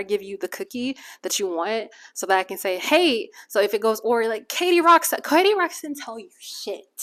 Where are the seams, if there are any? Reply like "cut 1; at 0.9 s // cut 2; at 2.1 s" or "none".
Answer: none